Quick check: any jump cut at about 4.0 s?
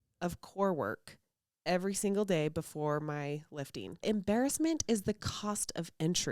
yes; 1 cut; at 4.0 s

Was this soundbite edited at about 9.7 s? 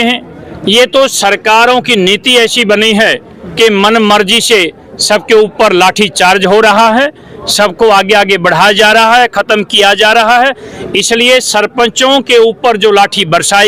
no; 0 cuts

